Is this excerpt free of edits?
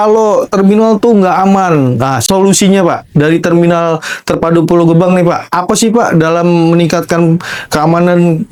yes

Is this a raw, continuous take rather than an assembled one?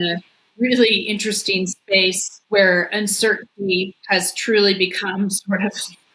no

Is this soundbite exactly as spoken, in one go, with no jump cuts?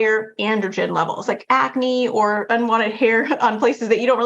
no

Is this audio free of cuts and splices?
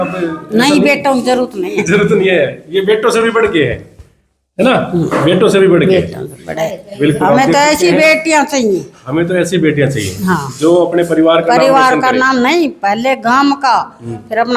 yes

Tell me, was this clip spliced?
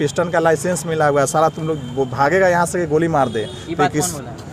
no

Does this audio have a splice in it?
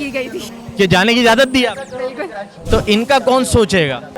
yes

